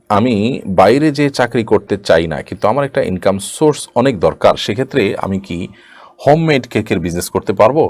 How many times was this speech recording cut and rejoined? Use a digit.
0